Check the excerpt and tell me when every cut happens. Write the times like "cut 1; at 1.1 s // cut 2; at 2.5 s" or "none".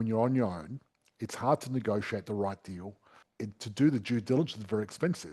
cut 1; at 3.2 s